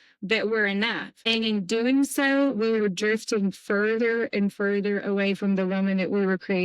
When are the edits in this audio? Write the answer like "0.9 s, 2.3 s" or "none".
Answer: 1.1 s